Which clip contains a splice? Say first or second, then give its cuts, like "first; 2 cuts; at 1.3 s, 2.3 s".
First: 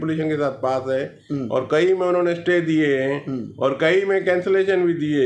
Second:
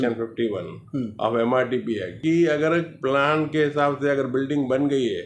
second; 1 cut; at 2.2 s